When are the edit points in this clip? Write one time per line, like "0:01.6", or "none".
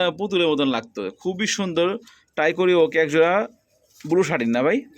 none